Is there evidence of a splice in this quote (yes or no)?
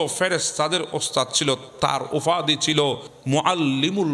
yes